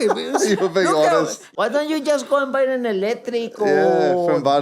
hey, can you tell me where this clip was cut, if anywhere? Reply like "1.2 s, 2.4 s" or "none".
1.5 s